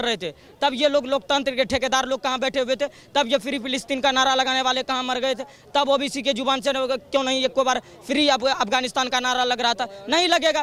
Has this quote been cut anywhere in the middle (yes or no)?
no